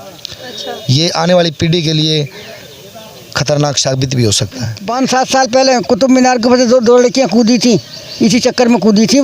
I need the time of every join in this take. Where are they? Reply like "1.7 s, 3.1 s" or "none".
4.8 s